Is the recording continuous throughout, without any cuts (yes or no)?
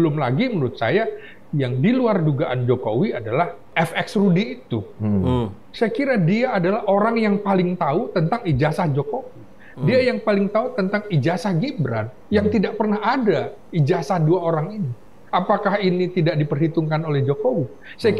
no